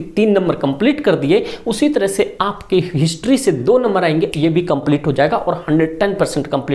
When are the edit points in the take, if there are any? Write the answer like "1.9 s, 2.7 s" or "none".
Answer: none